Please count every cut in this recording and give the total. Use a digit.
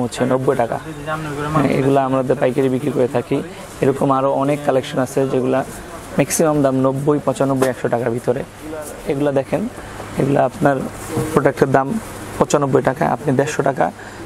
0